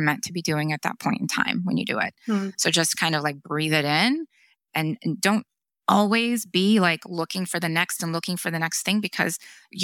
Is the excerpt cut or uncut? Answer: uncut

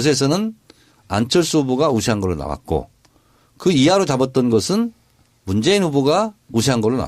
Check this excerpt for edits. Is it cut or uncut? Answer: cut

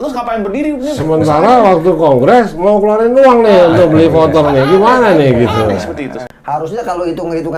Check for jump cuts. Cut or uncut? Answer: cut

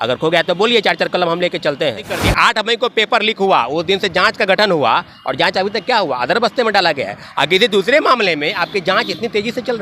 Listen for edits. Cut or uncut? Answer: cut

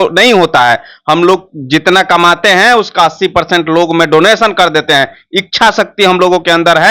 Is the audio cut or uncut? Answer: uncut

